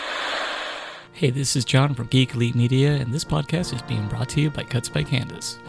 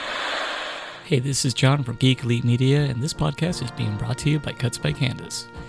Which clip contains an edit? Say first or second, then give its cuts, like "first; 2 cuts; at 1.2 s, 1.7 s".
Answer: second; 1 cut; at 0.9 s